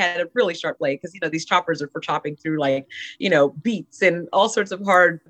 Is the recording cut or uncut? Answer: uncut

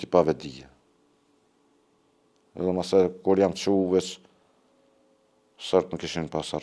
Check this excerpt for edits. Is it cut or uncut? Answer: uncut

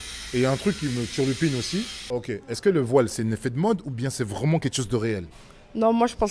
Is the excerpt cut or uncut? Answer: cut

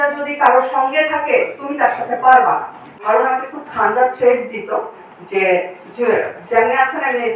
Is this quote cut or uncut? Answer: cut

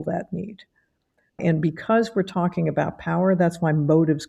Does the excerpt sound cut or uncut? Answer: cut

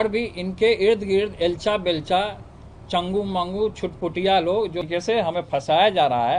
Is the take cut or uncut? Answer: cut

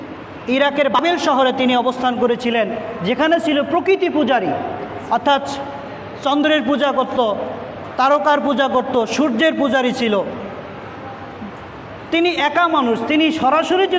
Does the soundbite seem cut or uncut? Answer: cut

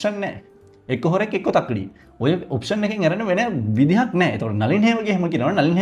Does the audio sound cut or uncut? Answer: uncut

